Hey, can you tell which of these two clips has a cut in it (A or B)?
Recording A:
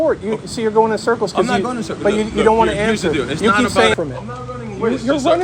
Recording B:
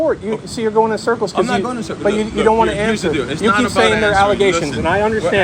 A